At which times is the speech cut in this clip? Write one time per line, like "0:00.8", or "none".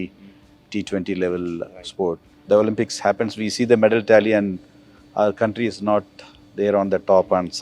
0:02.4